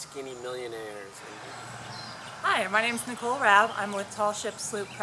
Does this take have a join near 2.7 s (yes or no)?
no